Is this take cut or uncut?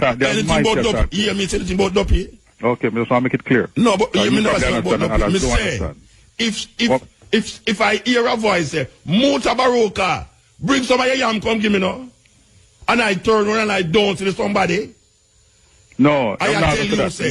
uncut